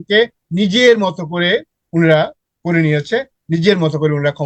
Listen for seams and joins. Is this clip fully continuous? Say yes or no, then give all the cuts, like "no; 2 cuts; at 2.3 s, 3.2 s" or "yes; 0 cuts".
yes; 0 cuts